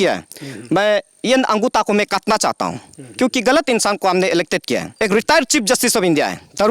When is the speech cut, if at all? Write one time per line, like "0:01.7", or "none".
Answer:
0:04.9